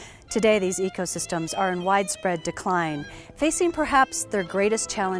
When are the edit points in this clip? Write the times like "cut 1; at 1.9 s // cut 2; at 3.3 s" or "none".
cut 1; at 4.2 s

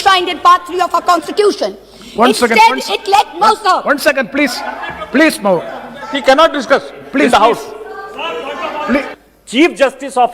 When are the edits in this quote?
cut 1; at 9.1 s

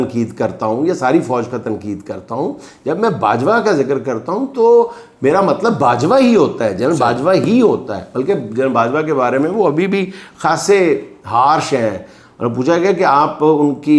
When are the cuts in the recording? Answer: none

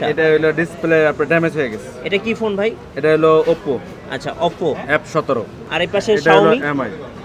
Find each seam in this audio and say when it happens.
cut 1; at 5.6 s

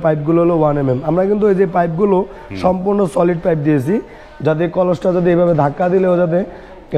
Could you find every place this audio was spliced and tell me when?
none

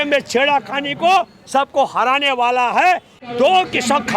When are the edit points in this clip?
cut 1; at 3.2 s

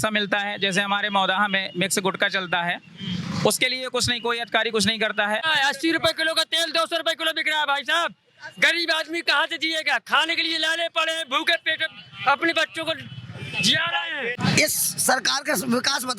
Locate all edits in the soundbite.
cut 1; at 5.4 s // cut 2; at 14.3 s

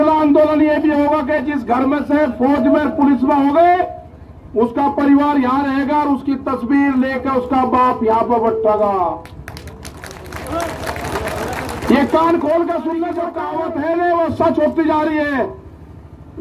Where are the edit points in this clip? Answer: cut 1; at 13.4 s

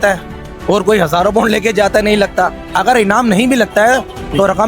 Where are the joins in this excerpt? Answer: cut 1; at 2.6 s

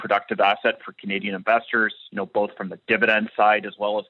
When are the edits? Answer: none

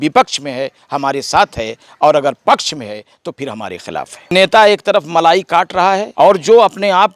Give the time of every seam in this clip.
cut 1; at 4.3 s // cut 2; at 6.1 s

